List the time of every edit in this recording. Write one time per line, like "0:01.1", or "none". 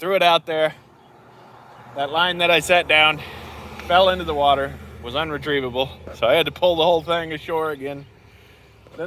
none